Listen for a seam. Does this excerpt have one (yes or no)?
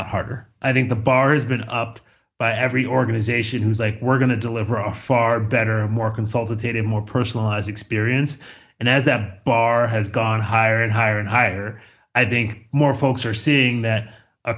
no